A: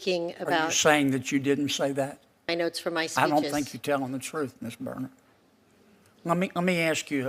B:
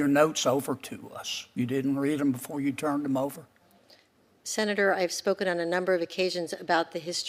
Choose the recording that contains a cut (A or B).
A